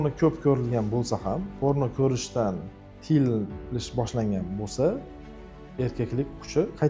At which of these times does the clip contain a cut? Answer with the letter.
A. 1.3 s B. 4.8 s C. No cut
C